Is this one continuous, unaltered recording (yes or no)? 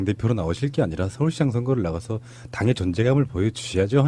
no